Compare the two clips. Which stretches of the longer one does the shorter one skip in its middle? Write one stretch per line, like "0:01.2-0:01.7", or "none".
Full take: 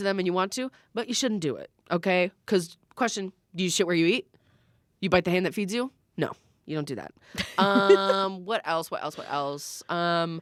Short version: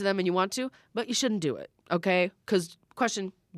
none